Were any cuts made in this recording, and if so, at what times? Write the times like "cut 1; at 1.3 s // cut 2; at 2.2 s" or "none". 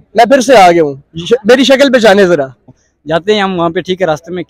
cut 1; at 2.8 s